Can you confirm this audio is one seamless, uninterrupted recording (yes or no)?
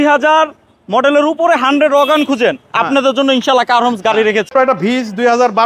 no